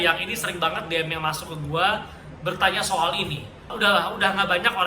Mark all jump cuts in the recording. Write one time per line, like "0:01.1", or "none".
0:03.7